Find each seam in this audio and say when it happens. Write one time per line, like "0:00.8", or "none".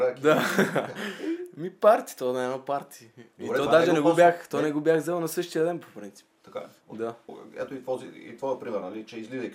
0:07.3